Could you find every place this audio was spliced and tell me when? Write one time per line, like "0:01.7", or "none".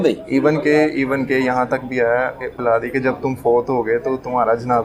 0:02.5